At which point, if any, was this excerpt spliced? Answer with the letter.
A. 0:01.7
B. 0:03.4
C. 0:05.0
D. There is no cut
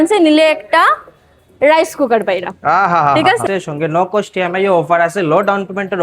B